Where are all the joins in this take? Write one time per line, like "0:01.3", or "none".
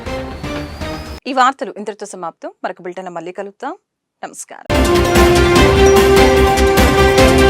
none